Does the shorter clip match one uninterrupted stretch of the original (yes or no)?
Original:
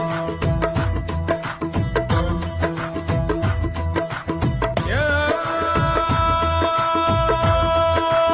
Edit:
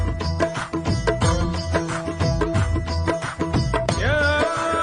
yes